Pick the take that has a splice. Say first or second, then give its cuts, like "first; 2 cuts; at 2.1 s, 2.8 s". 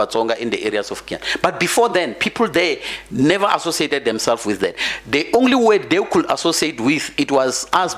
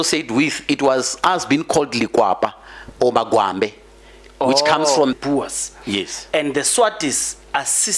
second; 1 cut; at 5.1 s